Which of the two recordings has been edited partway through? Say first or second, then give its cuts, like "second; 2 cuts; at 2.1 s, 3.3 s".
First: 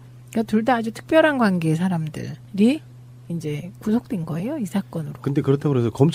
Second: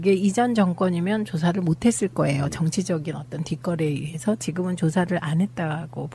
first; 1 cut; at 3.1 s